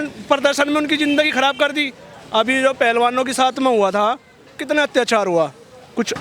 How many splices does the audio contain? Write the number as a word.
zero